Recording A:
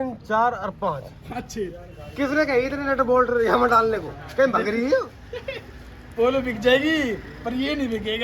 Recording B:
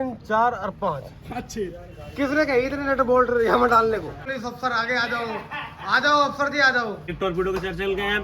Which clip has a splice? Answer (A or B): B